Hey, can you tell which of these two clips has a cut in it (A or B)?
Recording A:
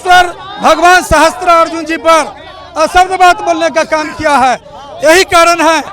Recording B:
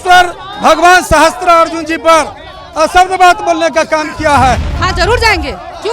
B